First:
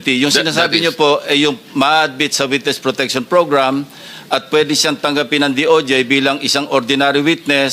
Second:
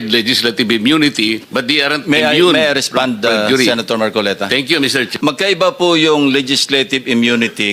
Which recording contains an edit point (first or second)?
second